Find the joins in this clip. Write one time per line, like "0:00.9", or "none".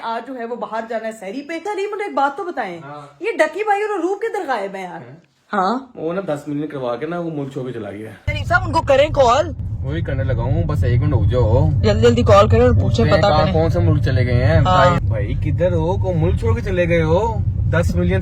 0:01.7
0:08.3
0:15.0